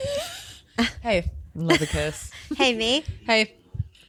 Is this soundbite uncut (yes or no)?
yes